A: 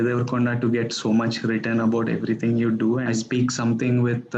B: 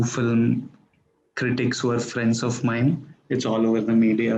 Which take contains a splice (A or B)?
A